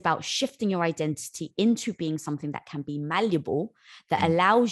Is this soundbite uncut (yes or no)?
yes